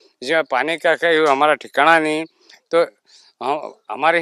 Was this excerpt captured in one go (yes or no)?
yes